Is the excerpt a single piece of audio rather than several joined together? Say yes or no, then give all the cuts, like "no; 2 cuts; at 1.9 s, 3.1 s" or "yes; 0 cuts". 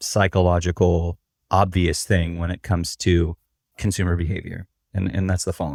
yes; 0 cuts